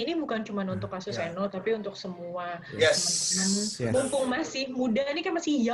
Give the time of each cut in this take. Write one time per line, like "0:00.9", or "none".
none